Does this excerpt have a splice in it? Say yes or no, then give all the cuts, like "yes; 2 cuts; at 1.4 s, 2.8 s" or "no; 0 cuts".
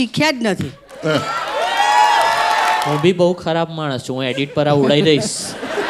yes; 1 cut; at 2.9 s